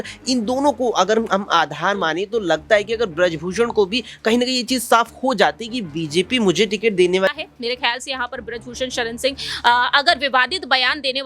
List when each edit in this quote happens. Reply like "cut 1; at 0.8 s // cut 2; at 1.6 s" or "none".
cut 1; at 7.3 s